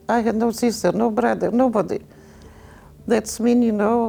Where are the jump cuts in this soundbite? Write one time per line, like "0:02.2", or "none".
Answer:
none